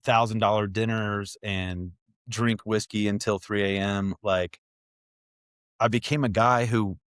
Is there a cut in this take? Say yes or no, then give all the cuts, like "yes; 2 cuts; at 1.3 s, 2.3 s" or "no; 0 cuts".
no; 0 cuts